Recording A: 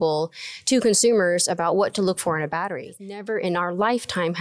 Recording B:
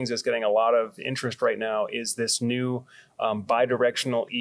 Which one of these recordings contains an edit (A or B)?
A